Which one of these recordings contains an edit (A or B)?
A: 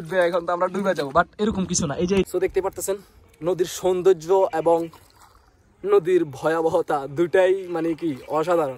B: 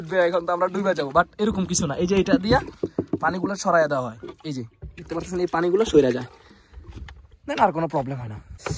A